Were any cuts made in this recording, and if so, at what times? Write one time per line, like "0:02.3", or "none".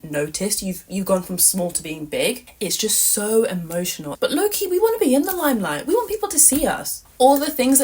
0:02.4
0:04.1